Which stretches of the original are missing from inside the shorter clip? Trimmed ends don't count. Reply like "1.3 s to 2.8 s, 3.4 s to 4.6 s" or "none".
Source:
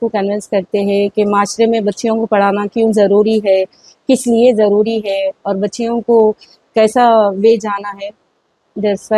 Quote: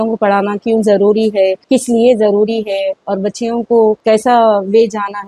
3.7 s to 4.0 s, 6.4 s to 6.7 s